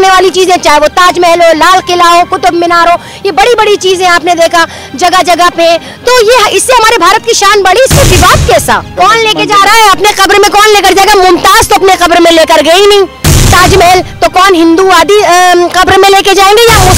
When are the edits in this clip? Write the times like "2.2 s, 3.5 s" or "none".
8.9 s